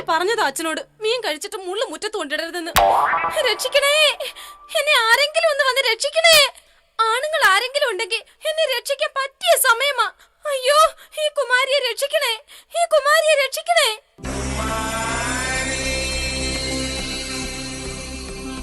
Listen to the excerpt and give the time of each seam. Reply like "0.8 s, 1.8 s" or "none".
8.0 s